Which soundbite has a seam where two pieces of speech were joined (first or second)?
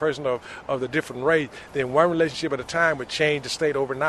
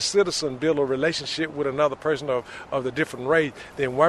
first